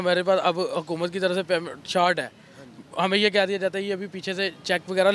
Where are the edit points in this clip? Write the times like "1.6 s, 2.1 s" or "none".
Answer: none